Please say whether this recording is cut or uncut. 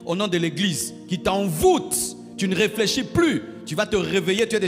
uncut